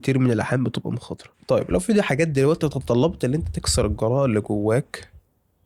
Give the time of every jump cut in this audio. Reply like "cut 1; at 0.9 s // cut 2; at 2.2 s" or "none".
none